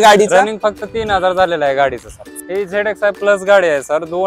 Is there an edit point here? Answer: yes; 1 cut; at 2.3 s

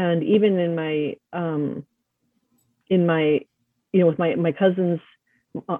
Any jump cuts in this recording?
no; 0 cuts

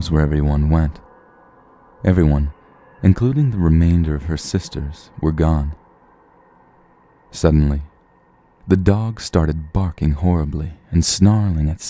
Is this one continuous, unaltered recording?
yes; 0 cuts

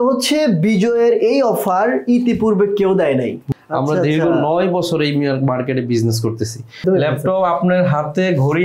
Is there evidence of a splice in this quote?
yes; 2 cuts; at 3.4 s, 6.8 s

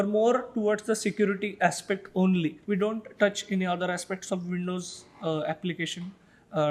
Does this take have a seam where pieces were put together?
yes; 1 cut; at 2.6 s

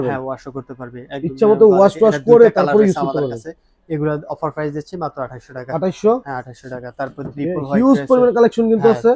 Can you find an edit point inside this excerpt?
no; 0 cuts

